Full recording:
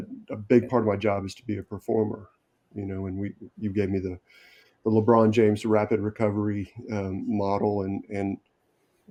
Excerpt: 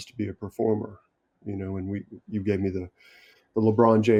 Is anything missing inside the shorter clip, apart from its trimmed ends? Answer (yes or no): no